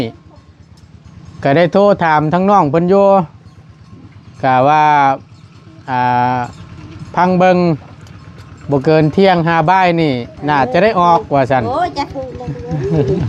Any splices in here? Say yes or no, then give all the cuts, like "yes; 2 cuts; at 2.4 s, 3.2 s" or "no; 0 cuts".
no; 0 cuts